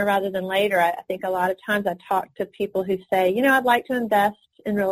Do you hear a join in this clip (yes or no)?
no